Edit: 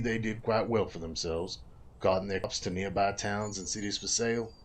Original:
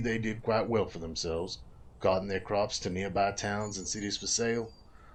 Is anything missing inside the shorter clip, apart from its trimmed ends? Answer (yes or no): yes